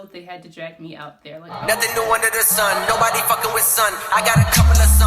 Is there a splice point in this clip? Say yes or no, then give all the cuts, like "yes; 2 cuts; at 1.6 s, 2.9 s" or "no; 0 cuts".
yes; 1 cut; at 1.6 s